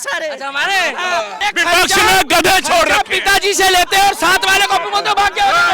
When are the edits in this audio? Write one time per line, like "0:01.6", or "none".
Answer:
0:01.3